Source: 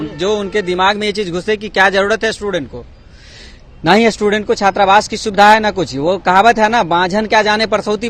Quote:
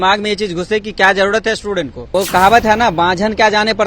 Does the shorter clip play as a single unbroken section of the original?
no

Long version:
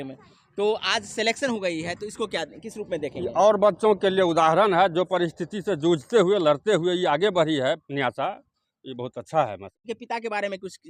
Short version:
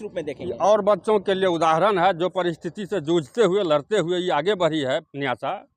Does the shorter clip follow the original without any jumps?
yes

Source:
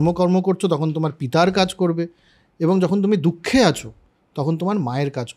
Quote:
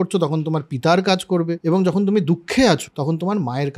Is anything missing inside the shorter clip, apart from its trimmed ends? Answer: yes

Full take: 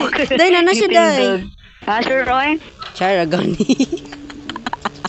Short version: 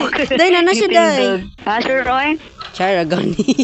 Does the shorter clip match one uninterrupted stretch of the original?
no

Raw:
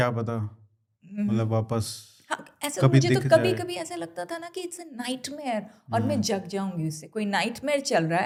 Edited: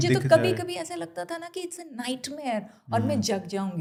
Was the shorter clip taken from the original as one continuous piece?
yes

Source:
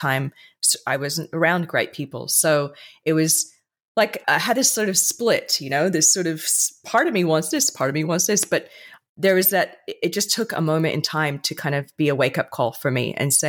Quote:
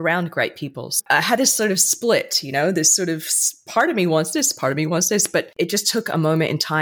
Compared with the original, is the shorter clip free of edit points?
no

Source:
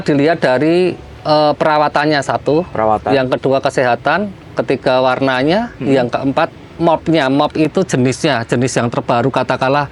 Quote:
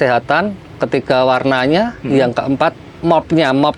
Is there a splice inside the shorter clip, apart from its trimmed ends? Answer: no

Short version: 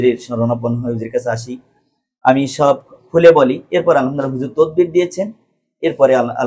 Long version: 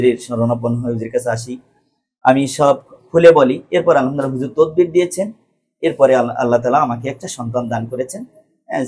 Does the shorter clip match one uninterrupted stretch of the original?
yes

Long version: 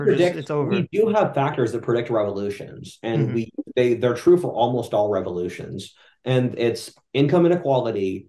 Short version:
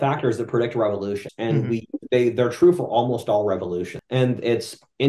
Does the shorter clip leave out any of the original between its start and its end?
yes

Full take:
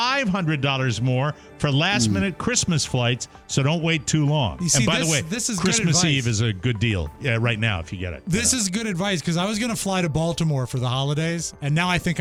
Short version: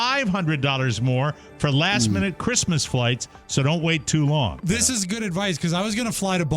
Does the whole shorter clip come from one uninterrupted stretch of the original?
no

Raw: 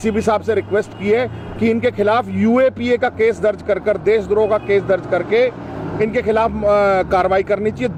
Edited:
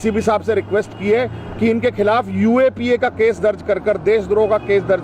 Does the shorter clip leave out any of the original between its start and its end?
no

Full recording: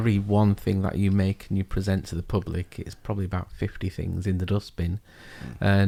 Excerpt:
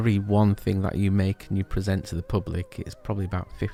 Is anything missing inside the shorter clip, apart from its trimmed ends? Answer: no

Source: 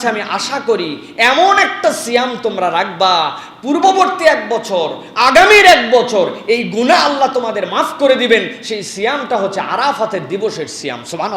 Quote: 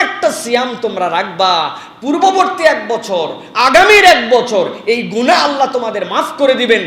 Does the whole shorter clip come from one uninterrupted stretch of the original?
yes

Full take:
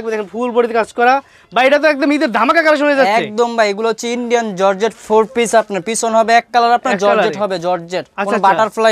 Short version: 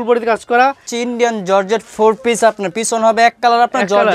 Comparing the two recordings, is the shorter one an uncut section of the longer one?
no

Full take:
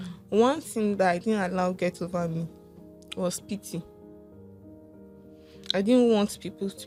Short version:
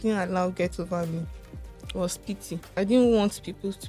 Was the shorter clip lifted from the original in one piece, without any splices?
no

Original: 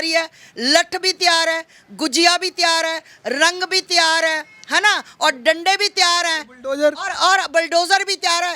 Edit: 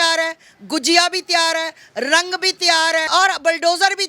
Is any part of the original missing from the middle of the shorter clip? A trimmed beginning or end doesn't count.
yes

